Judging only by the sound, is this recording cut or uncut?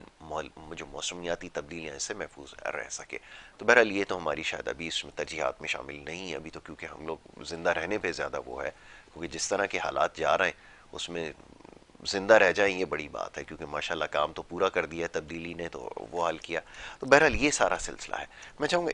uncut